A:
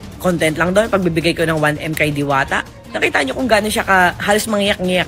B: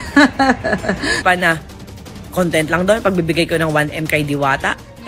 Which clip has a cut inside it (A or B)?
B